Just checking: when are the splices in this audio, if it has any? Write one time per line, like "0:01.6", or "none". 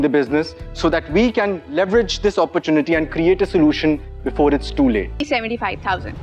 0:05.2